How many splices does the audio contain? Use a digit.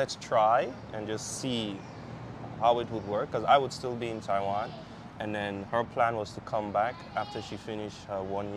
0